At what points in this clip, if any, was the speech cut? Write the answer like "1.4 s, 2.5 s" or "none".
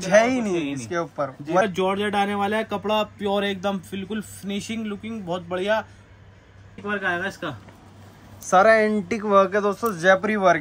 1.6 s, 6.8 s

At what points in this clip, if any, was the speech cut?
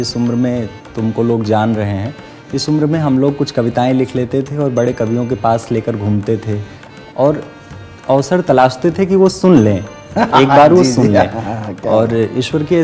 none

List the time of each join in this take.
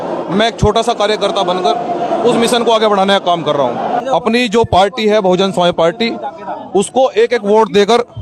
4.0 s

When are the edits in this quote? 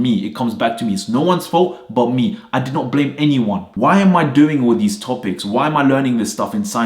3.7 s

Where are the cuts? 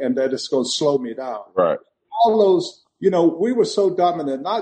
none

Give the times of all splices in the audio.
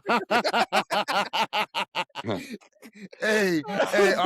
2.2 s

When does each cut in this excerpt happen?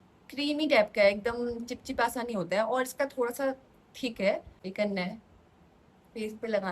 4.6 s

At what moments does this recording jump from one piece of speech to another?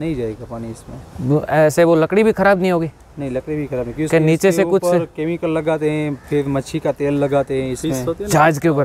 none

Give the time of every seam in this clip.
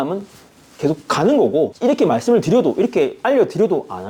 none

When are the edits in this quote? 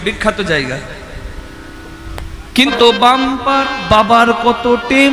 2.7 s

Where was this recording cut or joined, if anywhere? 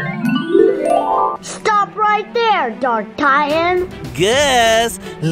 1.4 s, 4.0 s

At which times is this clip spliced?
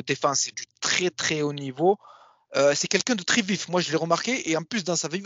none

